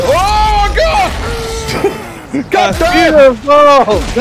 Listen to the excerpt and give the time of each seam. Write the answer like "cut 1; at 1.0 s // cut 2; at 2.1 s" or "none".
none

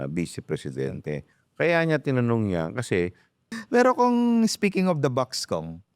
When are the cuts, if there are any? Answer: cut 1; at 1.3 s // cut 2; at 3.5 s

